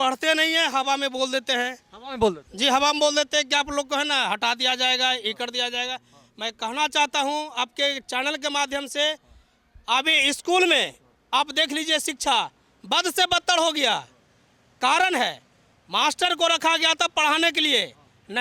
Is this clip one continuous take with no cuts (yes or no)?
yes